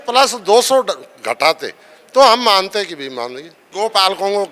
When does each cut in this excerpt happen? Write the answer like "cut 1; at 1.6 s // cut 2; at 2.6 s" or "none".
cut 1; at 3.6 s